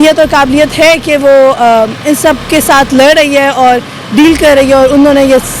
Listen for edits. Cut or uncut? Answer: uncut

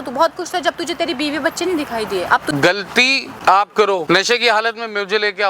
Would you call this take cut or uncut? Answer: cut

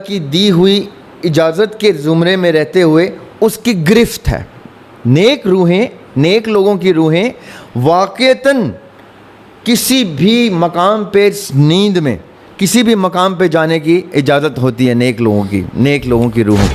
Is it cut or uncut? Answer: uncut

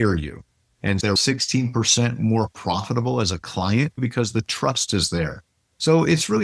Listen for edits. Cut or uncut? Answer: cut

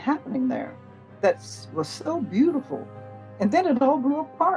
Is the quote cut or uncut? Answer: cut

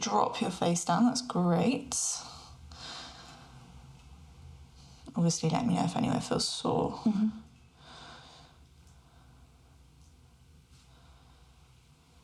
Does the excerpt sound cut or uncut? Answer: uncut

